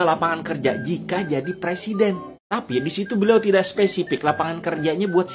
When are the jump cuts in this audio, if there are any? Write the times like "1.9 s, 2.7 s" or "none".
2.3 s